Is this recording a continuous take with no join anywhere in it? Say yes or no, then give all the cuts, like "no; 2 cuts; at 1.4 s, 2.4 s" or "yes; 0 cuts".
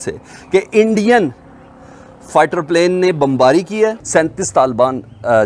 no; 1 cut; at 4.0 s